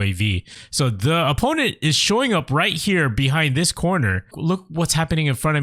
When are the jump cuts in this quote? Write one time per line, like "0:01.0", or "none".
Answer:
0:04.3